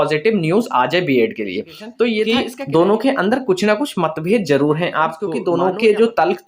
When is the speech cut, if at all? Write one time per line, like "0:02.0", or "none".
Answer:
0:02.3
0:05.3